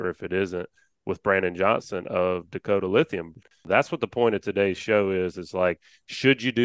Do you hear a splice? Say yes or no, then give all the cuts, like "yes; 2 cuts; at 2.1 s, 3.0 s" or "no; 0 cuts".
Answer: yes; 1 cut; at 3.7 s